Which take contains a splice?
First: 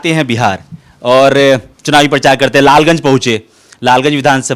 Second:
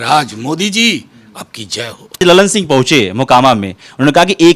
second; 1 cut; at 2.2 s

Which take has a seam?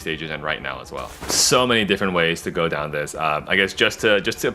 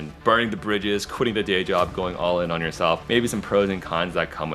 first; 1 cut; at 1.2 s

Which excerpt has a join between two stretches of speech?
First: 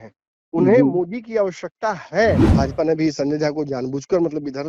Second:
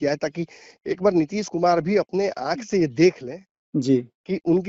first; 1 cut; at 2.5 s

